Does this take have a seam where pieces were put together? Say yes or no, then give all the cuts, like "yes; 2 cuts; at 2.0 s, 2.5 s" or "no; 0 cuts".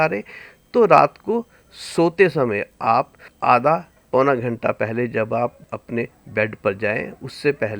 yes; 3 cuts; at 3.2 s, 3.9 s, 5.7 s